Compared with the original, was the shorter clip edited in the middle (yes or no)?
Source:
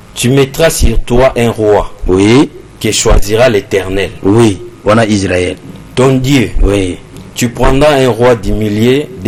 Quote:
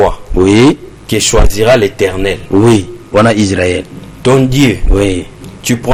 no